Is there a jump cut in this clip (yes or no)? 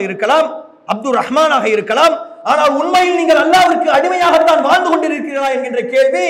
no